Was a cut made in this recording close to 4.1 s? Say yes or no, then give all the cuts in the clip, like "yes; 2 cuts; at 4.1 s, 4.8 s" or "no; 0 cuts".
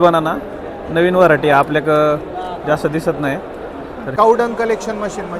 yes; 1 cut; at 4.1 s